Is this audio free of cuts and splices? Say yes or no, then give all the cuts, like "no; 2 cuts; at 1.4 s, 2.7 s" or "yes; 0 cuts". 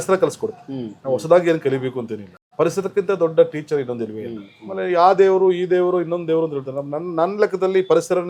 yes; 0 cuts